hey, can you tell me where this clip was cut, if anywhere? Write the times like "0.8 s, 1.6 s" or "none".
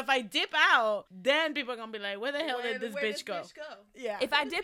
1.1 s